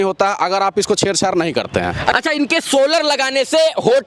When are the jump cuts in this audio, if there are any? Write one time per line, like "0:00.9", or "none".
0:02.1

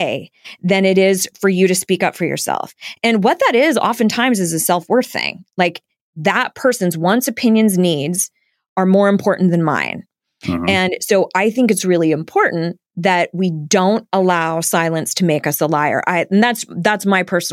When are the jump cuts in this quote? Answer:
0:06.1

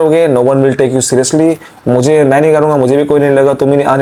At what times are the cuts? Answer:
none

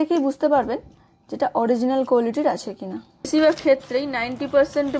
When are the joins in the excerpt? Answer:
0:03.3

